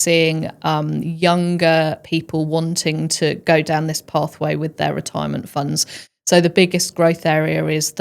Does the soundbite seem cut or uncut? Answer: uncut